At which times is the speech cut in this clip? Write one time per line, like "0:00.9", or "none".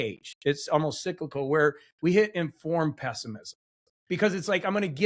none